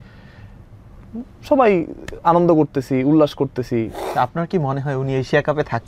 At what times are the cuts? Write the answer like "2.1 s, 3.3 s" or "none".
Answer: 4.0 s

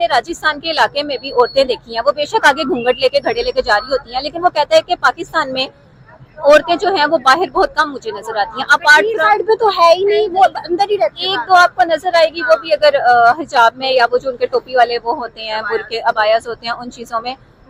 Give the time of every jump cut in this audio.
none

